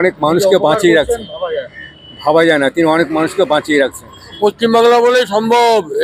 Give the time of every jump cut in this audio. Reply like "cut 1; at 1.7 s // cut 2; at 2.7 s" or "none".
cut 1; at 4.4 s